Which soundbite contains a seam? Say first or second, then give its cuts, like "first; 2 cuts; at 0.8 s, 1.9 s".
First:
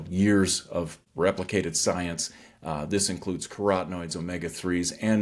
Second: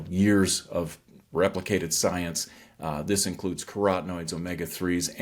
first; 1 cut; at 1.0 s